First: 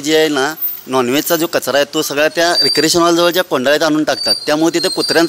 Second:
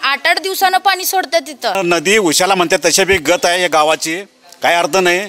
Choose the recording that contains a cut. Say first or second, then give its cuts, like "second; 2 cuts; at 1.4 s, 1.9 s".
second; 1 cut; at 1.8 s